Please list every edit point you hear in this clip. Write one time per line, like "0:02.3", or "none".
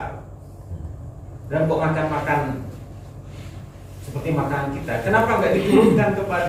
none